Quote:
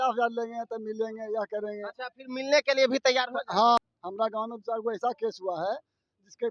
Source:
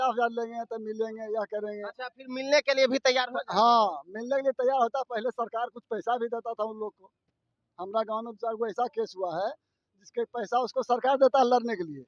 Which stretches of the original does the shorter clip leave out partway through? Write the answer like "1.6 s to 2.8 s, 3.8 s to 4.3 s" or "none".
3.8 s to 7.5 s